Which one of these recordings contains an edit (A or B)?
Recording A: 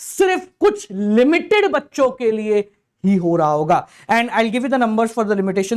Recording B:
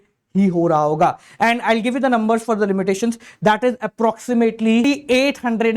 B